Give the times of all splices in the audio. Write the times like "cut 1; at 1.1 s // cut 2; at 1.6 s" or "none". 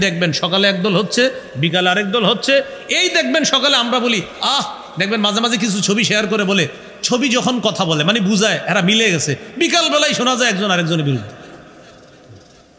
none